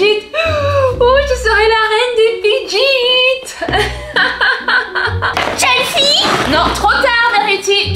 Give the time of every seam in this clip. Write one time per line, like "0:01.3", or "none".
0:05.3